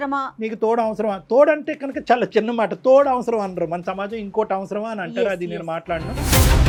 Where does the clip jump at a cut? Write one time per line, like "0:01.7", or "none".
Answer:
none